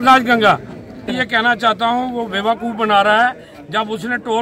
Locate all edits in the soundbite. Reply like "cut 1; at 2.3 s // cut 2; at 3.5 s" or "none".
cut 1; at 1.2 s

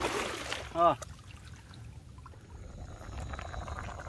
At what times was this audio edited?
cut 1; at 2.6 s

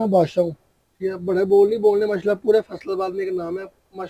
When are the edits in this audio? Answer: none

